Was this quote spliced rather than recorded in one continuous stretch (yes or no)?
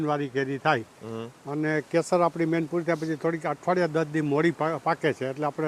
no